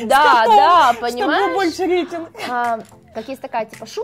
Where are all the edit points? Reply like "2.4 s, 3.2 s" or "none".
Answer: 3.0 s